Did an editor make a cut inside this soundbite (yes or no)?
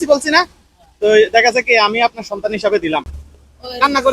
yes